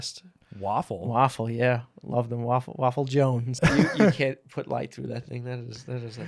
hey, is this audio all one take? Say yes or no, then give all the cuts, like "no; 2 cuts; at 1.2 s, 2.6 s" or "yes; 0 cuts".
no; 1 cut; at 3.6 s